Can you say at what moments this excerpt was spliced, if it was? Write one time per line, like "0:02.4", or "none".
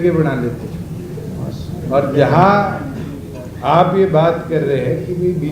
none